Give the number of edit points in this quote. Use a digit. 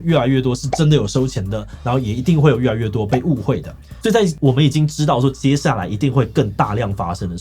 1